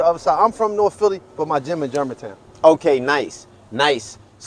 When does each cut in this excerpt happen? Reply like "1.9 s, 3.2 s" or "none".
none